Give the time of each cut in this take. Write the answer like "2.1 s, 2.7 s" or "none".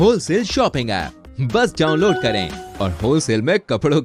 none